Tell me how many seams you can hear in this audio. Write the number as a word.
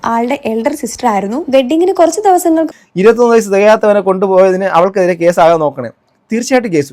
one